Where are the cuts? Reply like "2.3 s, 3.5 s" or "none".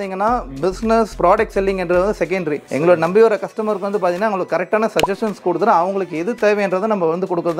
none